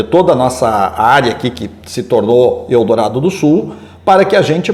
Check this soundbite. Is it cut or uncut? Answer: uncut